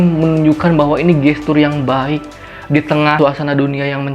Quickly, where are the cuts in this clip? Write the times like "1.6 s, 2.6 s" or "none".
3.2 s